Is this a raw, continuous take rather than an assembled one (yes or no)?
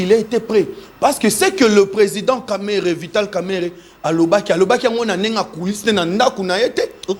yes